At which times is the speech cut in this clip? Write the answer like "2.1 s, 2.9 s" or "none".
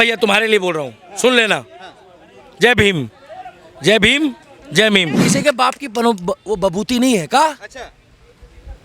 5.2 s

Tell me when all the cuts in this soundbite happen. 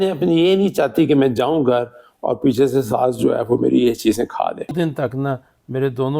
4.7 s

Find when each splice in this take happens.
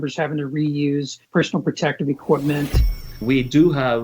3.0 s

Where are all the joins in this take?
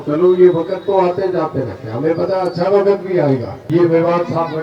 3.6 s

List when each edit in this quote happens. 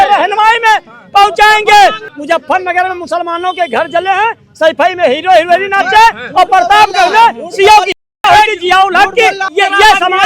2.1 s, 9.5 s

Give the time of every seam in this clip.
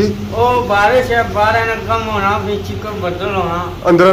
none

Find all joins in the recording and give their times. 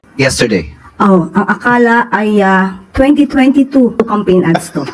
4.0 s

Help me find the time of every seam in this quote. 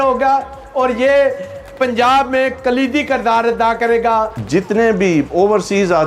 4.4 s

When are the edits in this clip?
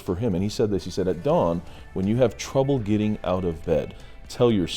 3.8 s

